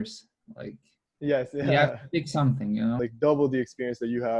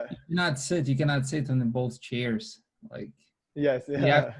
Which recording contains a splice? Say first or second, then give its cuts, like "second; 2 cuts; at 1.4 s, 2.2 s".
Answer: first; 1 cut; at 3.0 s